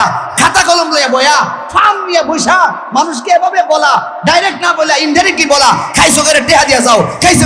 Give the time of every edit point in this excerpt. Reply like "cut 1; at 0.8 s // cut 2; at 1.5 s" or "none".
none